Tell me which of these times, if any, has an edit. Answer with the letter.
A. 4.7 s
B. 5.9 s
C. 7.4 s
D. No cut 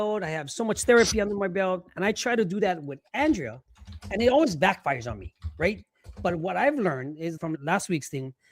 C